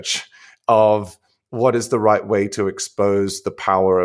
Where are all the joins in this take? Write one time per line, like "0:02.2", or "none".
none